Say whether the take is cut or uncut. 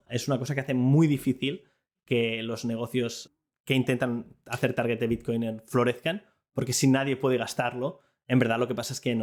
uncut